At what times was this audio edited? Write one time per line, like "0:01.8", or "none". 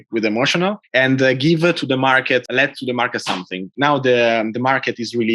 0:02.5
0:03.7